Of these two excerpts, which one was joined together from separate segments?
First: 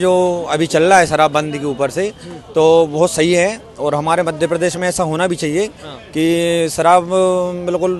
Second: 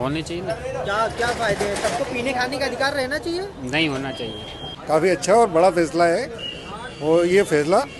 second; 1 cut; at 4.7 s

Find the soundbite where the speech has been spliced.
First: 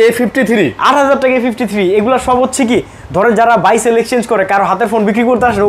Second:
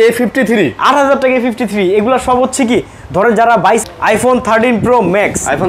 second; 1 cut; at 3.8 s

